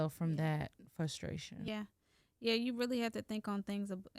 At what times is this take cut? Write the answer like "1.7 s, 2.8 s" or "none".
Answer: 1.7 s

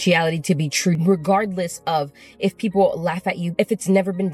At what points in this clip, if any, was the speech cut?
none

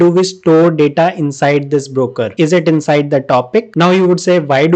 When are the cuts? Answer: 3.7 s

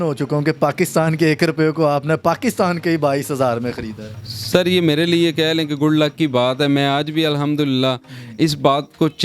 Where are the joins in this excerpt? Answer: none

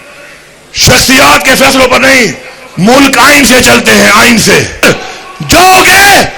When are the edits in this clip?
4.8 s

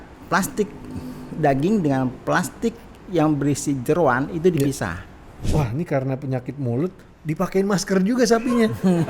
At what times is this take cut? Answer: 5.4 s

